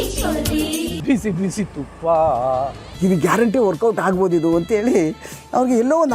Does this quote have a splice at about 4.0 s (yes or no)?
no